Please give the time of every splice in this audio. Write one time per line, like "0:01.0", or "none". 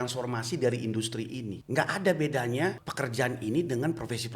0:01.6
0:02.9